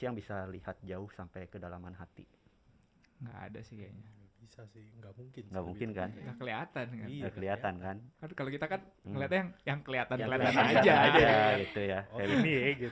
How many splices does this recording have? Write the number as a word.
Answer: zero